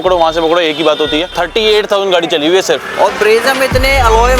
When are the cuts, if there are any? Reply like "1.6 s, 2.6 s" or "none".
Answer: 1.3 s